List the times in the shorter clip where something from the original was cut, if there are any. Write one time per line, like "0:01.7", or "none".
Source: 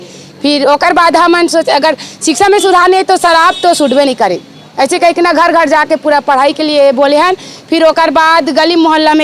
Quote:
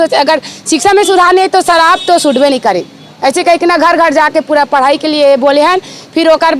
none

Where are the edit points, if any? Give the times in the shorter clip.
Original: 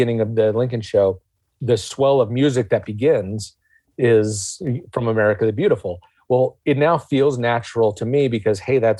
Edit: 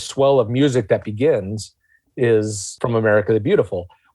0:02.7

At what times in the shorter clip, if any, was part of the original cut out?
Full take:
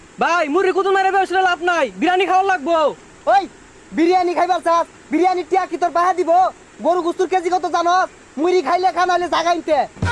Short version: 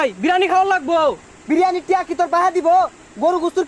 0:01.3

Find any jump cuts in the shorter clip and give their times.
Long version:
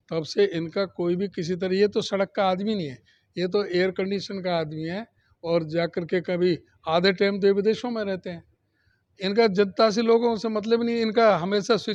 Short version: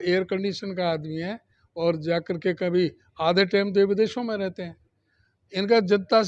none

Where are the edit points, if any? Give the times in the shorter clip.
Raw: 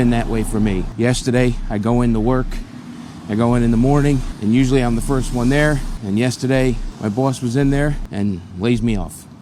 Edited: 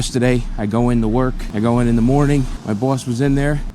0:01.4
0:02.5

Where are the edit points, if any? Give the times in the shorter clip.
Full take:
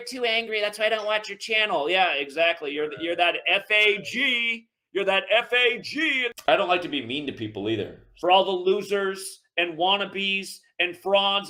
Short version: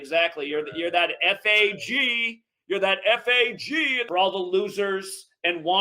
0:04.0

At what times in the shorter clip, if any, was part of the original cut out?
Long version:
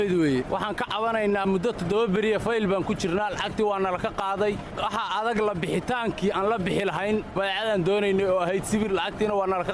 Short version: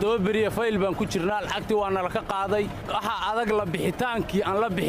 none

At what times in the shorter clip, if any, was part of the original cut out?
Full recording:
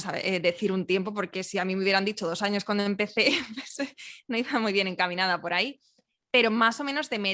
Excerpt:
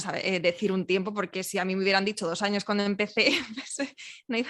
none

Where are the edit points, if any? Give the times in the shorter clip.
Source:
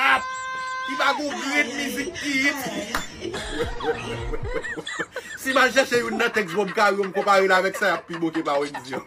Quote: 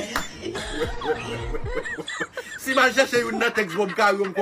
none

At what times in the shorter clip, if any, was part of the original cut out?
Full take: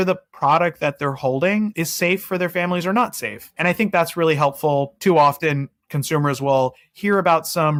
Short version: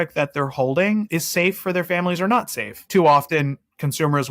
0:02.8

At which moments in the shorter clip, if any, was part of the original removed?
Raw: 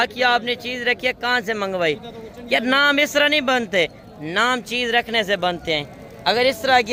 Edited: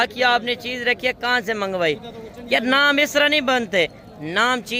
none

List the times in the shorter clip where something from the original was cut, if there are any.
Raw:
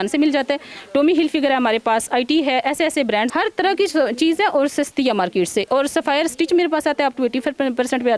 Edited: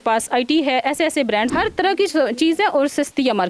none

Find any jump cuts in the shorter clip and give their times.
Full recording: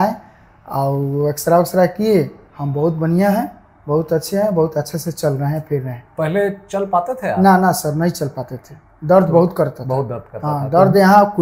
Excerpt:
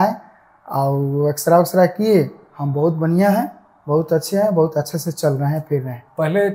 none

